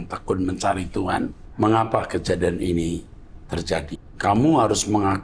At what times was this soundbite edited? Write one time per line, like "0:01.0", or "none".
0:01.4
0:03.9